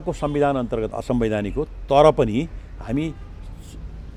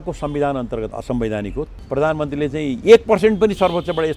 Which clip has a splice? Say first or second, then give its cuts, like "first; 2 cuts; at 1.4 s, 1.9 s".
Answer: second; 1 cut; at 1.8 s